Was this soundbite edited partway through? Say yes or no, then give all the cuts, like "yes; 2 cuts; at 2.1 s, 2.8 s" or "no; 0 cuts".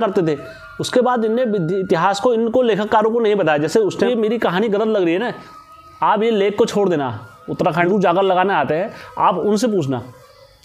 yes; 2 cuts; at 4.1 s, 7.9 s